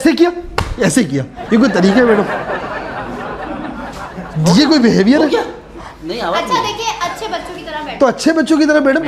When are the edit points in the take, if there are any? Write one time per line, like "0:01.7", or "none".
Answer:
none